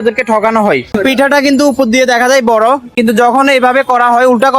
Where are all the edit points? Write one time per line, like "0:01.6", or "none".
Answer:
0:00.9